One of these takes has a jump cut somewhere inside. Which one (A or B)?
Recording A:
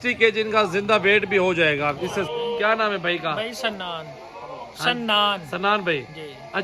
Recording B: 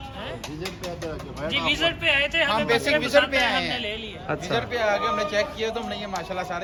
A